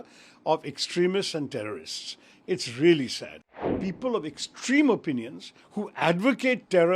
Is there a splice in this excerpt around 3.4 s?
yes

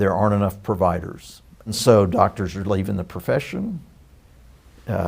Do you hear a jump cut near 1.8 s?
yes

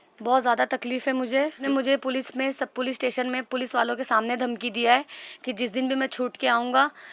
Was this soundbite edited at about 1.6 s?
yes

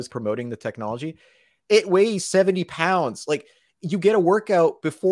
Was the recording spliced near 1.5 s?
yes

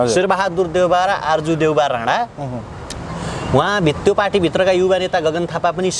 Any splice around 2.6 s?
no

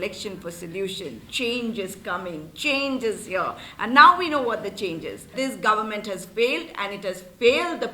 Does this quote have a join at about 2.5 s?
no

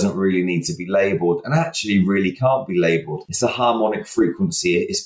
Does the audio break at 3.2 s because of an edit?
yes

